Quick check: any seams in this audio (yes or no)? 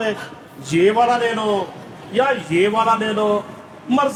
no